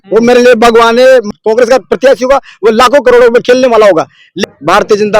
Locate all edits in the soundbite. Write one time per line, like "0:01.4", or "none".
0:01.3
0:04.4

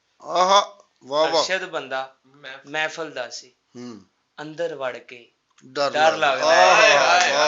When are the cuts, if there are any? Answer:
none

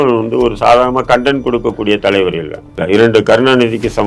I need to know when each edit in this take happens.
0:02.8

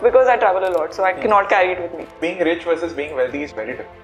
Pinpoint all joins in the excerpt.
0:02.1

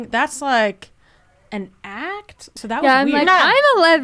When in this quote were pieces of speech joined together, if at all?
0:02.5

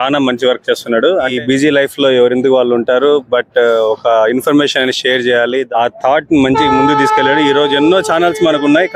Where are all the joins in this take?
0:01.4
0:05.7

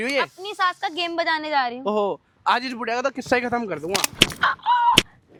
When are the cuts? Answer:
none

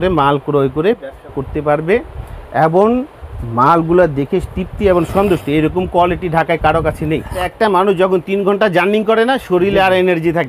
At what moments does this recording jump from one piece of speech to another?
0:07.5

